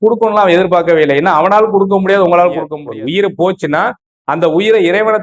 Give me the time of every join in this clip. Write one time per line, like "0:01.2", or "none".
0:02.8